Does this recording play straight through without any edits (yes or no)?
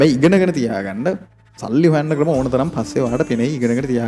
yes